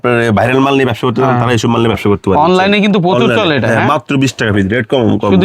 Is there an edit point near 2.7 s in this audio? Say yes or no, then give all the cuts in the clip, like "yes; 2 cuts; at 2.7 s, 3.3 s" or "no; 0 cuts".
no; 0 cuts